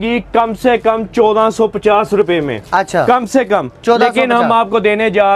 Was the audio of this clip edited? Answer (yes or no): no